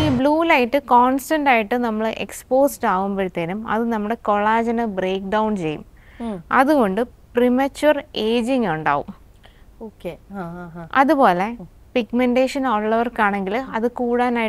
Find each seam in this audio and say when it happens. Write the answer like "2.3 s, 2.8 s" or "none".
none